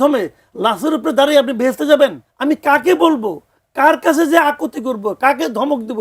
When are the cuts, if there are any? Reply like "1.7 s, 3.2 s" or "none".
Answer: 2.3 s